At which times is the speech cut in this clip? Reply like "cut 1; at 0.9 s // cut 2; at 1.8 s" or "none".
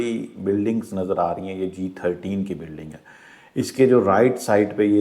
none